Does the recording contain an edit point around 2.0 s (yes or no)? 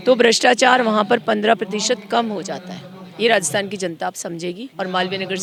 no